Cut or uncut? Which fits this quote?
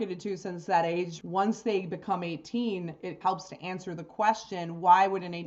cut